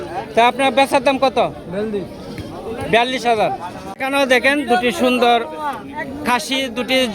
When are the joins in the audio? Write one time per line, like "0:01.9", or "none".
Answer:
0:03.9